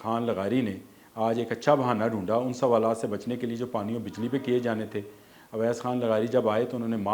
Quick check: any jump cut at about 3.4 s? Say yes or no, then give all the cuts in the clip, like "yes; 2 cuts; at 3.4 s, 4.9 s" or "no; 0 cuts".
no; 0 cuts